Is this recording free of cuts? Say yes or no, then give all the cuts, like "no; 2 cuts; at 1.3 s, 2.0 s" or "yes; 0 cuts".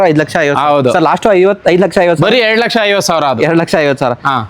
yes; 0 cuts